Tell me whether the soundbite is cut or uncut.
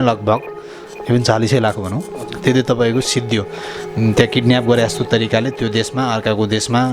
uncut